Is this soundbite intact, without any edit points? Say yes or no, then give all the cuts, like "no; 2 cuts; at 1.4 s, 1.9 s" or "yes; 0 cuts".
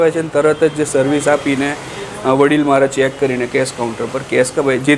yes; 0 cuts